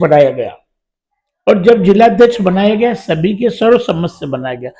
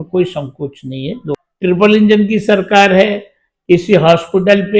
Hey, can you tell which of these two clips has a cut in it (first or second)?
second